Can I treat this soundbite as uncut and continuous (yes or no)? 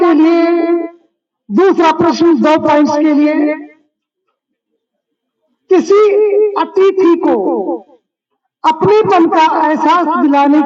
yes